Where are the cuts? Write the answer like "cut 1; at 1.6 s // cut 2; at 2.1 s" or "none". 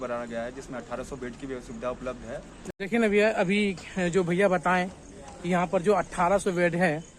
cut 1; at 2.7 s